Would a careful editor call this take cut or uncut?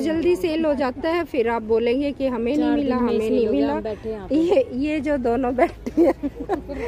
uncut